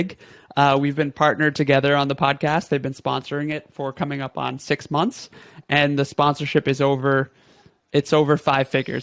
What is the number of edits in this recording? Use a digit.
0